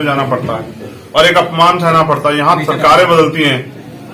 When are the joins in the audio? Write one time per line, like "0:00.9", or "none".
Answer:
none